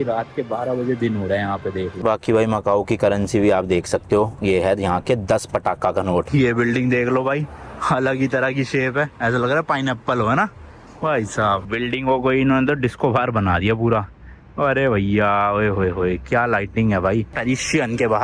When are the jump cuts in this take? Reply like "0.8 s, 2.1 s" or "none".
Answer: 2.0 s, 6.3 s, 11.6 s, 17.3 s